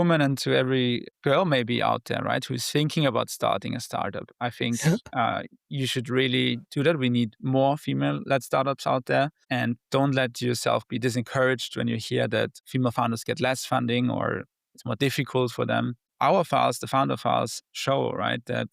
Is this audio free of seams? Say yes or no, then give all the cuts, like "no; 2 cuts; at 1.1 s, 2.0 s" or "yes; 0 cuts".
no; 4 cuts; at 1.1 s, 9.4 s, 12.6 s, 16.0 s